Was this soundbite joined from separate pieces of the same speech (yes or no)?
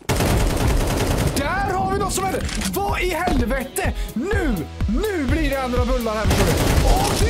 no